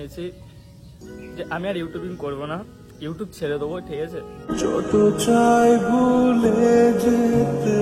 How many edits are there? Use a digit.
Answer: 0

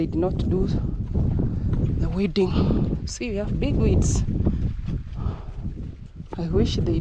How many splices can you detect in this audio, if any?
1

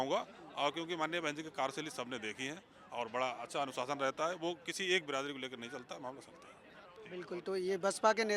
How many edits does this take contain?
0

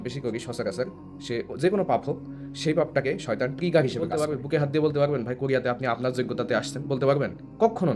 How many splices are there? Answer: 1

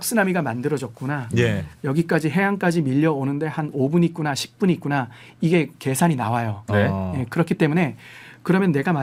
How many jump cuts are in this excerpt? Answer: 0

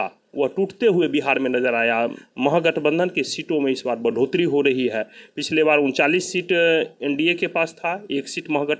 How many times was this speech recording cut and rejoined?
1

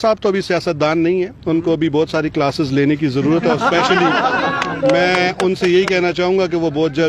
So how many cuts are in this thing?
0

